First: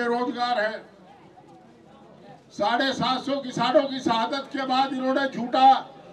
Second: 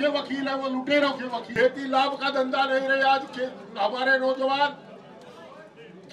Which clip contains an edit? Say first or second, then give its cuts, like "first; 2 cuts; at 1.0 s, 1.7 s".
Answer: second; 1 cut; at 1.5 s